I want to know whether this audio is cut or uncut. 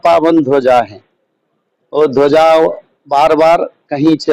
uncut